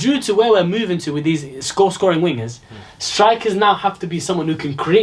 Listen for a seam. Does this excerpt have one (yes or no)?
no